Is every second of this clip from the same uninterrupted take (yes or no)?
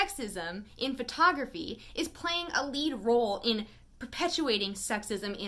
yes